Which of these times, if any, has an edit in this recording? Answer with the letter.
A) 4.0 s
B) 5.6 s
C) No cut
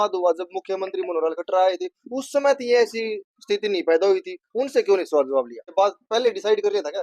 B